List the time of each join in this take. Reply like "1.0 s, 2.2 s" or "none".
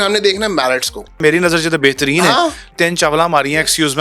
1.2 s, 2.7 s